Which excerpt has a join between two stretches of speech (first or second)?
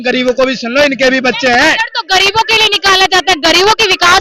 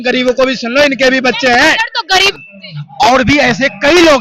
second